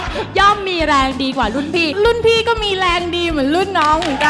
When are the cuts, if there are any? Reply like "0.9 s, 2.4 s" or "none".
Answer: 1.9 s